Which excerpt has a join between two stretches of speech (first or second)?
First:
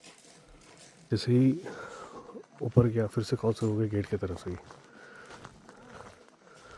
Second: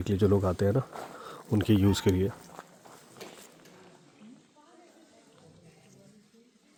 first